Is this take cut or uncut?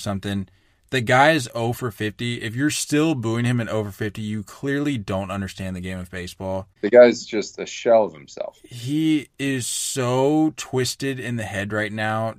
cut